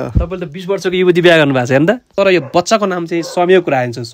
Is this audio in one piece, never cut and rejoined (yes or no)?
no